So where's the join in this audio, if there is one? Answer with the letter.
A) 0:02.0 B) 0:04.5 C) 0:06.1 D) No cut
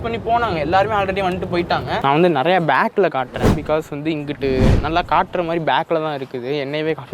A